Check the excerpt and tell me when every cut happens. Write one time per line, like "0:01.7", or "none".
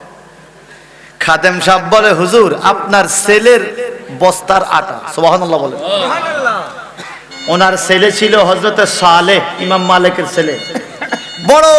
none